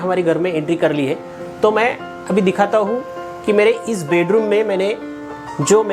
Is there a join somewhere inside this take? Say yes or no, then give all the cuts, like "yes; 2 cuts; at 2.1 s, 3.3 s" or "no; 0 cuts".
no; 0 cuts